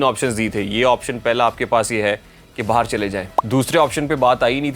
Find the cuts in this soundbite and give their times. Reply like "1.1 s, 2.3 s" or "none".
3.3 s